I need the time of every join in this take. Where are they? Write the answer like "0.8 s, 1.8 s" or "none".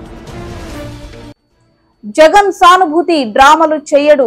none